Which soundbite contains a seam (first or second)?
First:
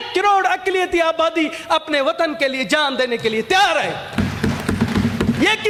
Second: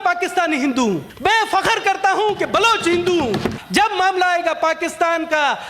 second